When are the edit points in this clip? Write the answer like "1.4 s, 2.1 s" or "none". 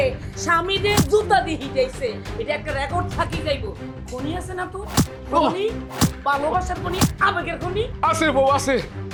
none